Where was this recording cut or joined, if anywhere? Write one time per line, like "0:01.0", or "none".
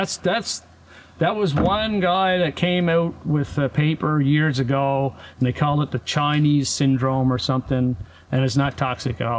none